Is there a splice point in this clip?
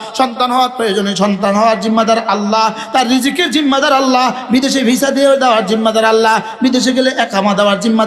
no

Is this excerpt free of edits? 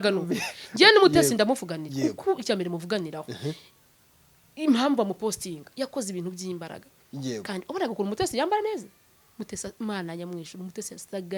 yes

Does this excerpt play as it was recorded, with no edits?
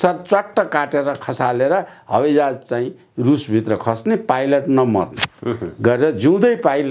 yes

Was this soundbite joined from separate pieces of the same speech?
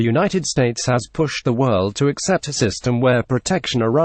yes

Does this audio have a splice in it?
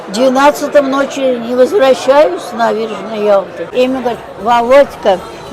yes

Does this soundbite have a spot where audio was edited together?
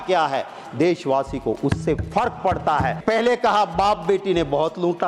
yes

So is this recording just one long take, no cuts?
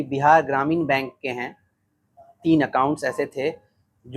yes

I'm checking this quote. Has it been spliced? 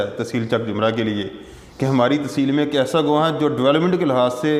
no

